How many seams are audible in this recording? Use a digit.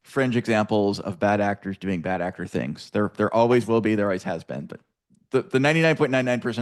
0